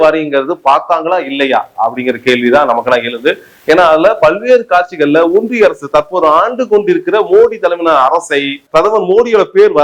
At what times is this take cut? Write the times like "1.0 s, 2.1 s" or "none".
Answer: 8.6 s